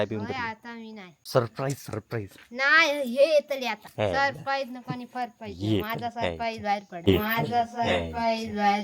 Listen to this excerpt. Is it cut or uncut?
cut